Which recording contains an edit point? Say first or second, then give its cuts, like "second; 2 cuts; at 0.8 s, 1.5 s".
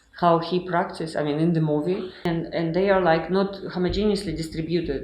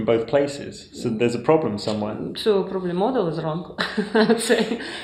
first; 1 cut; at 2.2 s